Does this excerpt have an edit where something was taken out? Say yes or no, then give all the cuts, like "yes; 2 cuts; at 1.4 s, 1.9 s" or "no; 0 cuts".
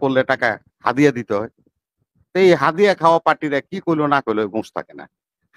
no; 0 cuts